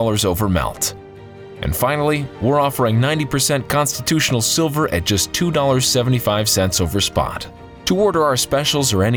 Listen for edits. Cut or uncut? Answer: uncut